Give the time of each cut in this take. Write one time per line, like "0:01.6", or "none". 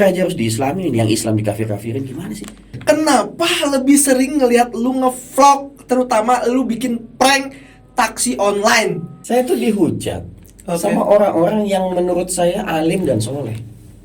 0:02.8
0:09.1